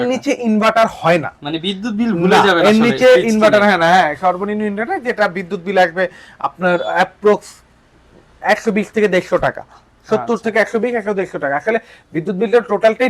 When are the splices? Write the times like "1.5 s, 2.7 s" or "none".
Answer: none